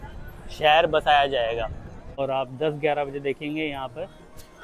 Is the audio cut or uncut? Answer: cut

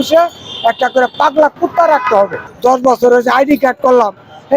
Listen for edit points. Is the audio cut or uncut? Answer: cut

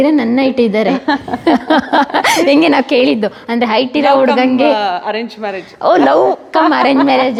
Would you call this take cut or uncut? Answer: uncut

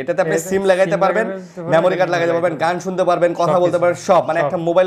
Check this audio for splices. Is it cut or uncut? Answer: uncut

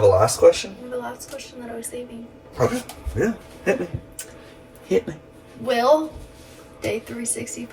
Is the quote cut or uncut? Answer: uncut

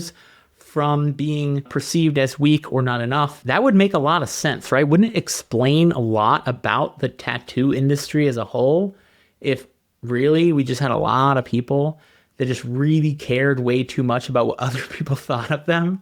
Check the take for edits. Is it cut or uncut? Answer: cut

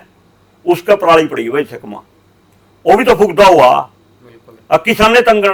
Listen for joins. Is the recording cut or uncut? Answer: uncut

